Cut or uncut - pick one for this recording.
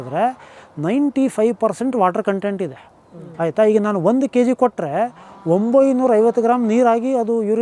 uncut